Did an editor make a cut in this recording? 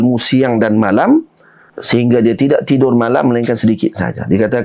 yes; 1 cut; at 1.7 s

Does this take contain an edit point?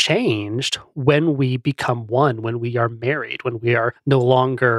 no; 0 cuts

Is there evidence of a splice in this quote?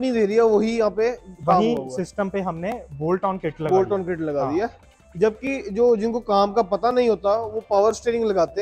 no; 0 cuts

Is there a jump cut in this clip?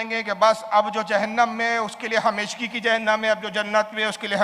no; 0 cuts

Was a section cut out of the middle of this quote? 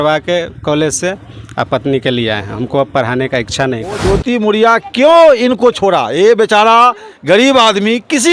yes; 1 cut; at 4.0 s

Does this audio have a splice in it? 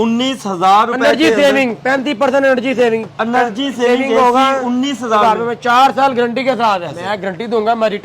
yes; 2 cuts; at 3.1 s, 7.0 s

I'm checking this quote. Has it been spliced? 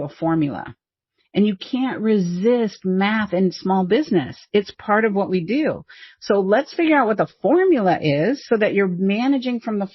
no; 0 cuts

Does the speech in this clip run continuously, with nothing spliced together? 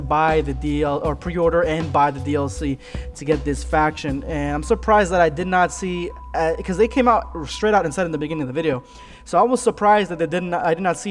no; 1 cut; at 2.5 s

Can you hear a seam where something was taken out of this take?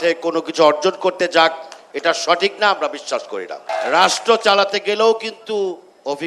yes; 1 cut; at 3.7 s

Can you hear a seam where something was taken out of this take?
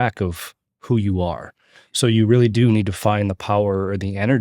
no; 0 cuts

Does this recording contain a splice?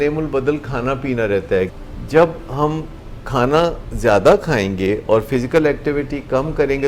yes; 1 cut; at 1.8 s

